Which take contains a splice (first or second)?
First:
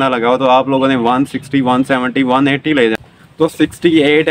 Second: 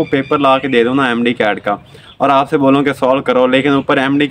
first